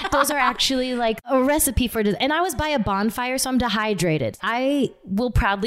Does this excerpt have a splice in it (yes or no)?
yes